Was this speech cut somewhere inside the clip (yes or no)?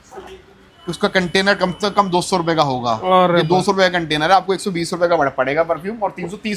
no